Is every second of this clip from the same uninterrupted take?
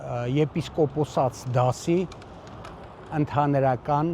yes; 0 cuts

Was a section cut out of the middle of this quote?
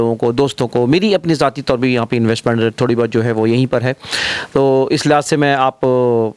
no; 0 cuts

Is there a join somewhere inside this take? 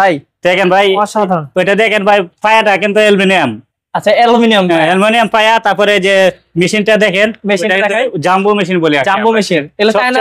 no; 0 cuts

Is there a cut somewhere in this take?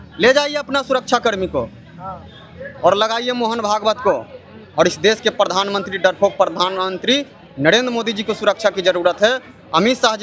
no; 0 cuts

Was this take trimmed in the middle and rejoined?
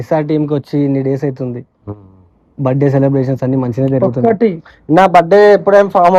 no; 0 cuts

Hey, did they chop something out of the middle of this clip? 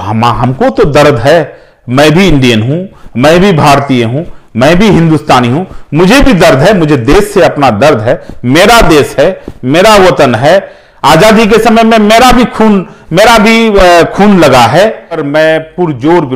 yes; 1 cut; at 15.2 s

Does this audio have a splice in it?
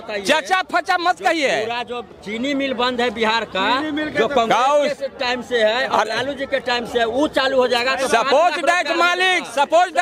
no; 0 cuts

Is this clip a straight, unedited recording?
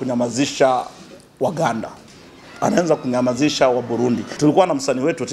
no; 1 cut; at 4.3 s

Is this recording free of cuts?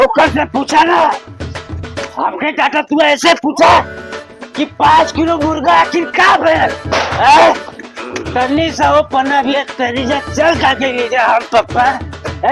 yes; 0 cuts

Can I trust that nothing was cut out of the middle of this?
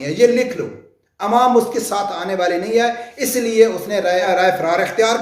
no; 1 cut; at 4.2 s

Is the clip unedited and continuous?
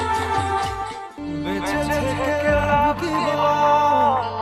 yes; 0 cuts

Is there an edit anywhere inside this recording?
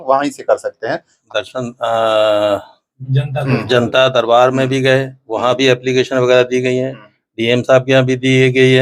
yes; 1 cut; at 1.2 s

